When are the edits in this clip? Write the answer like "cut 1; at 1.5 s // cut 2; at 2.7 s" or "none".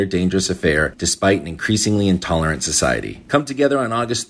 cut 1; at 3.1 s